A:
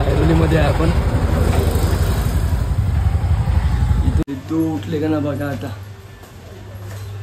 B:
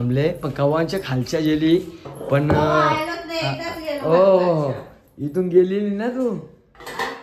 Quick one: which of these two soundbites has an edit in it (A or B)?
A